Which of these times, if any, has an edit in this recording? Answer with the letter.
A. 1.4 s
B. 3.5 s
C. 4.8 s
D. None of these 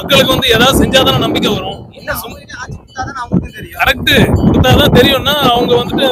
D